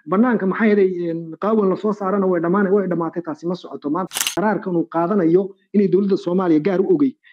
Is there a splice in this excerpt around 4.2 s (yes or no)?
yes